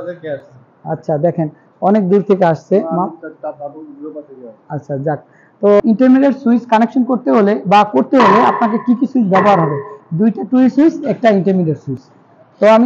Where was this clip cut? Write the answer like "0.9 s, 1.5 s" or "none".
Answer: 5.8 s